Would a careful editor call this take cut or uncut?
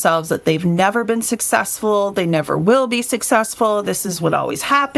uncut